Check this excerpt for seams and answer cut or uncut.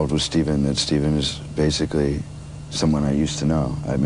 uncut